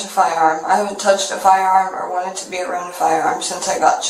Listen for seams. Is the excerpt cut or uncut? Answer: uncut